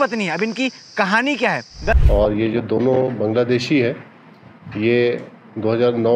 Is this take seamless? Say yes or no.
no